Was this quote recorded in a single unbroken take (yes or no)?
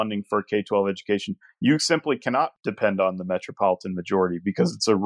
no